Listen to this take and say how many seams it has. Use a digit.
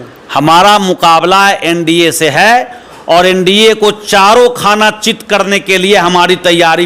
0